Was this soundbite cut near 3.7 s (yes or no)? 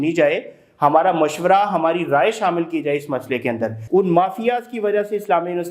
yes